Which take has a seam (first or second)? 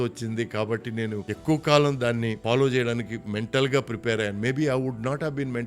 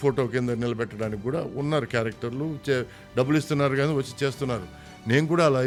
first